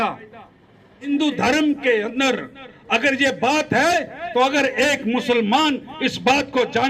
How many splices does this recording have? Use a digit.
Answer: 1